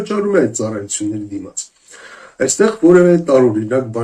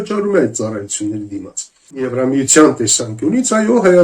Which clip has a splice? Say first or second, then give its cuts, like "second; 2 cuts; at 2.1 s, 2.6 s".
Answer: second; 1 cut; at 2.2 s